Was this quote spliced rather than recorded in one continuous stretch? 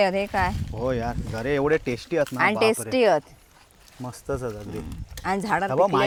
no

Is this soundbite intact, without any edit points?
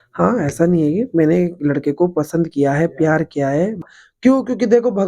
no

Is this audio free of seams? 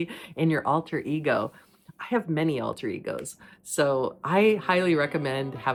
yes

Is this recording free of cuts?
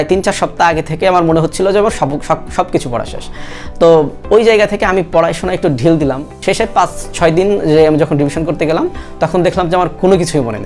no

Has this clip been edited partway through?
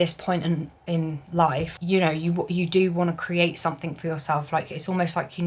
no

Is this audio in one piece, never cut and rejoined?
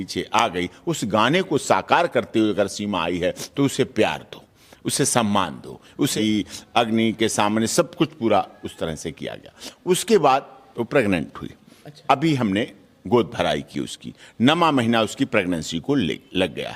no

